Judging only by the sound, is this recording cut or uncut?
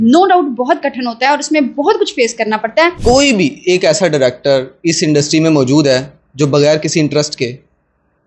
cut